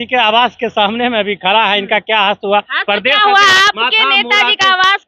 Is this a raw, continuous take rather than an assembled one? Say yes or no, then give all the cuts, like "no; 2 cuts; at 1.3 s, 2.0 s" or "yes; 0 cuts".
yes; 0 cuts